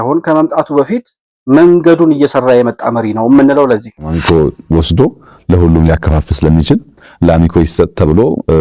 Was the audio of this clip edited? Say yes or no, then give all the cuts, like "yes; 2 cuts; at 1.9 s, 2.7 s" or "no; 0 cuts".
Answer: yes; 1 cut; at 4.2 s